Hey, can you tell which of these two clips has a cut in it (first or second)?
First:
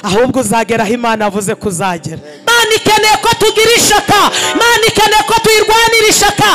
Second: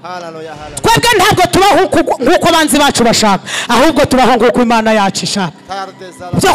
first